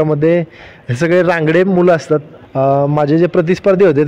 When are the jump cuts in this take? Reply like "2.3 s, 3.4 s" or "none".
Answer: 2.4 s